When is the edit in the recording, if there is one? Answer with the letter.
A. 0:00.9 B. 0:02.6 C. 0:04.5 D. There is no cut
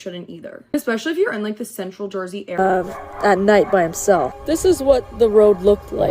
B